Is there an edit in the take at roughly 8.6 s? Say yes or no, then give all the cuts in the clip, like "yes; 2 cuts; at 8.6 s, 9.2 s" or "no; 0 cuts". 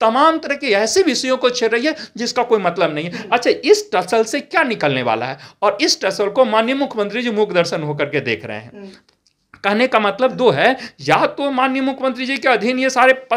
no; 0 cuts